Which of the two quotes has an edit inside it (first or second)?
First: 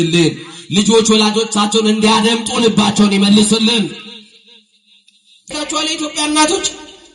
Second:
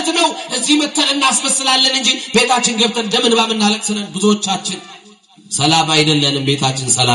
first